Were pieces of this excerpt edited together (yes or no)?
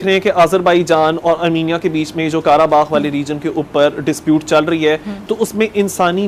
no